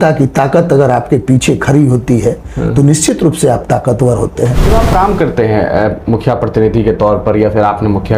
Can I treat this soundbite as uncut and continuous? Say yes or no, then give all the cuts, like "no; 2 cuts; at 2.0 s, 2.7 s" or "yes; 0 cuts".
no; 1 cut; at 4.6 s